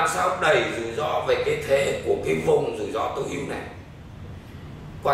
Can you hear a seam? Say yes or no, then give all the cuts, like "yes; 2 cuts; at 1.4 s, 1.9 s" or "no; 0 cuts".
no; 0 cuts